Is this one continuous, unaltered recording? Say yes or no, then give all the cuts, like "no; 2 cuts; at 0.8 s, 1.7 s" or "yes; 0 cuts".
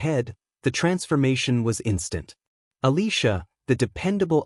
yes; 0 cuts